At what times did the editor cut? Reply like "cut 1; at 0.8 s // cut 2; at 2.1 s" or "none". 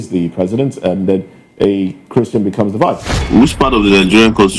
cut 1; at 3.3 s